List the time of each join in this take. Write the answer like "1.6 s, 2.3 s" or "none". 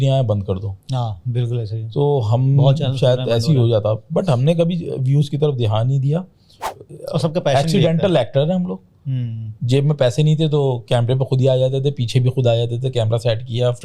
6.7 s